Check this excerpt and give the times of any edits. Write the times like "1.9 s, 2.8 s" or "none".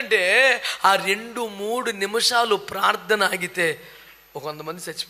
none